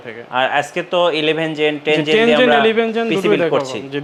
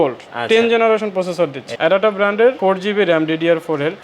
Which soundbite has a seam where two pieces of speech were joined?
second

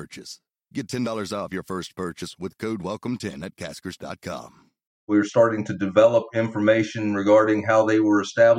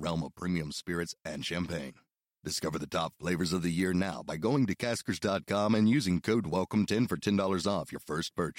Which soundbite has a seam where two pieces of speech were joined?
first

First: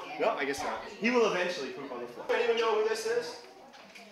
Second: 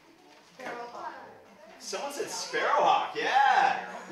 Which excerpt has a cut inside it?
first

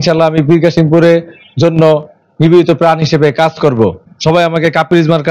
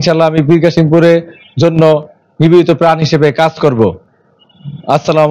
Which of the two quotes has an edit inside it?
first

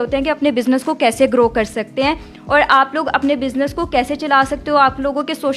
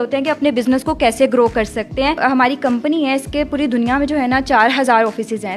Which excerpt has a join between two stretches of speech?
second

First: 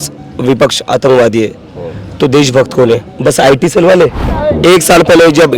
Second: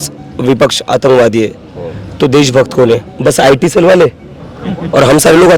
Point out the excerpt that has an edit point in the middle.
first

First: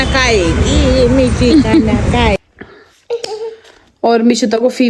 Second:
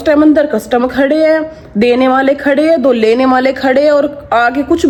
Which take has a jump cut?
first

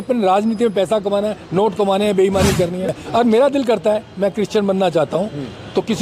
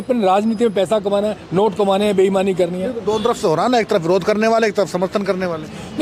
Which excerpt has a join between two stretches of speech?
first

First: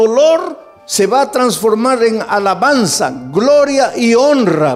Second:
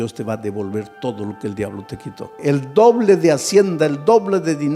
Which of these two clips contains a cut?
second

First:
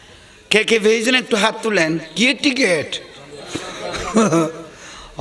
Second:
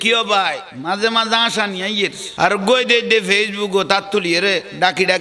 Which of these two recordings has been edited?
second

